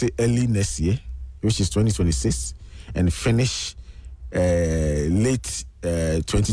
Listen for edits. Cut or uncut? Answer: uncut